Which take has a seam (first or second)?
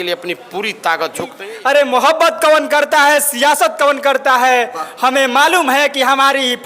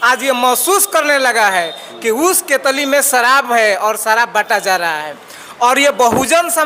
first